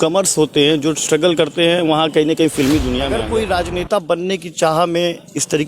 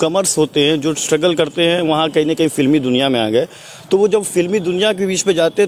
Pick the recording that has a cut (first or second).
first